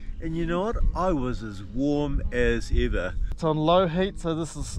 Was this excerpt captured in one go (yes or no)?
no